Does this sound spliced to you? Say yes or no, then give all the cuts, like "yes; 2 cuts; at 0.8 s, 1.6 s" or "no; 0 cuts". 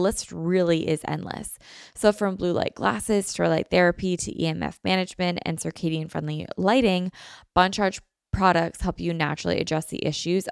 no; 0 cuts